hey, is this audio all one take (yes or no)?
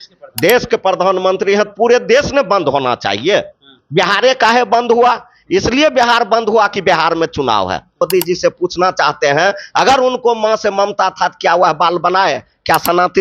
no